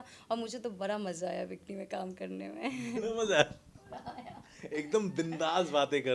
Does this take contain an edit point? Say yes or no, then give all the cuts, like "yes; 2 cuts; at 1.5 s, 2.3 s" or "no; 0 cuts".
no; 0 cuts